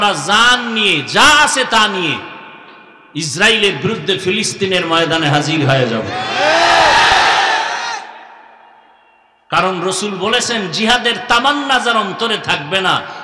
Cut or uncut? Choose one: uncut